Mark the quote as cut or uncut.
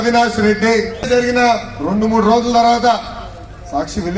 cut